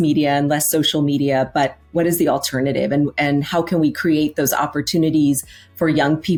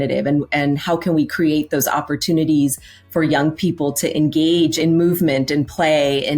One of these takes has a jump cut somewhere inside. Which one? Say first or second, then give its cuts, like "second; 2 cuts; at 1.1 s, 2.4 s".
second; 1 cut; at 4.8 s